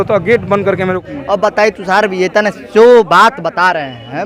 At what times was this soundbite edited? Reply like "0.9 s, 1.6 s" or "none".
1.0 s